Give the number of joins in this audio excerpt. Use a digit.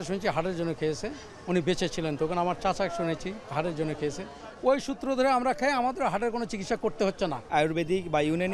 1